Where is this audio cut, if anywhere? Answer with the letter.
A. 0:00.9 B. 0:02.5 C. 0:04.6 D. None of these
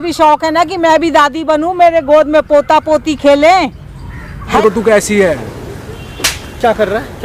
C